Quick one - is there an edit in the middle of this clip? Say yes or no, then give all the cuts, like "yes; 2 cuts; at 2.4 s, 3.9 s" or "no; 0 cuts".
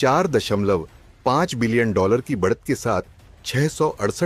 no; 0 cuts